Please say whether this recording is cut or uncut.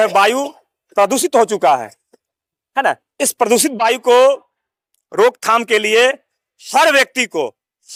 uncut